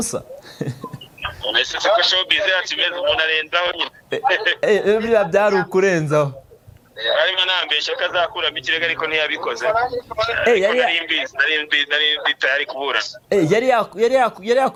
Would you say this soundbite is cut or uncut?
uncut